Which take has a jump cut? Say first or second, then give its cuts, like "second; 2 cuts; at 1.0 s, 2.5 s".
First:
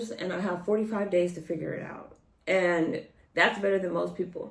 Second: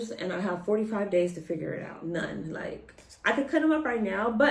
second; 1 cut; at 2.0 s